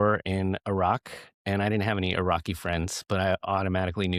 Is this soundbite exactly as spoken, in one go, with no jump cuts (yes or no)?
yes